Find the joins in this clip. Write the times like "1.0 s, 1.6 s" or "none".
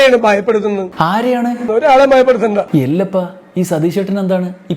0.9 s